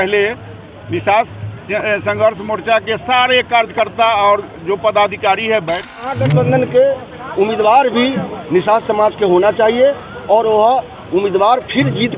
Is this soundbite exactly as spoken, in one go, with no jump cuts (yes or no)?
no